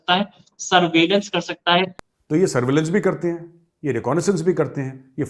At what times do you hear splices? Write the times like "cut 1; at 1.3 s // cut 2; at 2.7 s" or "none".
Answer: cut 1; at 2.0 s